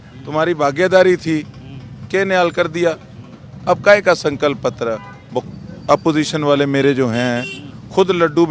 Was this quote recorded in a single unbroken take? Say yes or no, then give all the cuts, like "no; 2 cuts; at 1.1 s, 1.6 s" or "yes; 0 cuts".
no; 1 cut; at 5.4 s